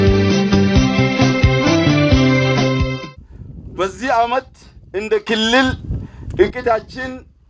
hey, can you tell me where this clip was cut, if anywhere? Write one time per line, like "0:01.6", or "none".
0:03.0